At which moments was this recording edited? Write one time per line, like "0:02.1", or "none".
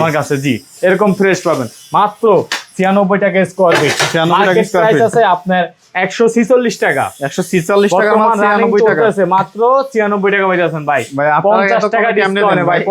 none

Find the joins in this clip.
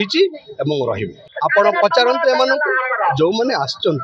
0:01.3

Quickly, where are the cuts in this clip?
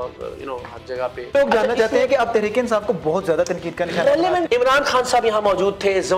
0:01.3
0:04.5

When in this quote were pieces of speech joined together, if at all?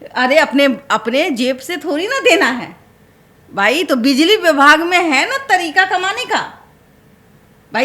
none

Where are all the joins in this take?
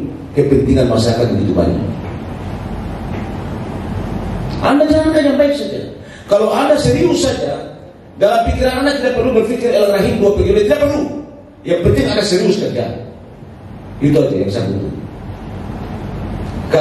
none

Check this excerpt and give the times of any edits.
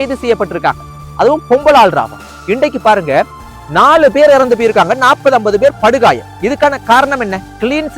0:02.4

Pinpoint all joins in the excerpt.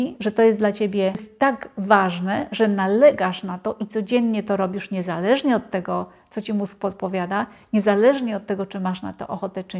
0:01.3

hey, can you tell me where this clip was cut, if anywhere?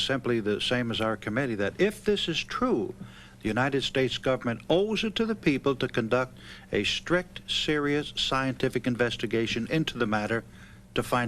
none

